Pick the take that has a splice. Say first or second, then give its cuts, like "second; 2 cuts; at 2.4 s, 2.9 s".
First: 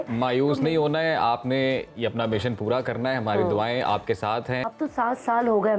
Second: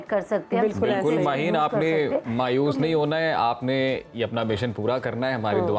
first; 1 cut; at 4.6 s